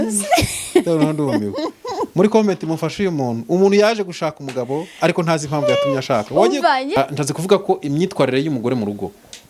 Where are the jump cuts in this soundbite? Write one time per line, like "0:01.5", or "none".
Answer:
0:07.0